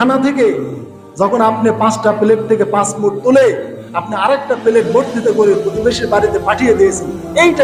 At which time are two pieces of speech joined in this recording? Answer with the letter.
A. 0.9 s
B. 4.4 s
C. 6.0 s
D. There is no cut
D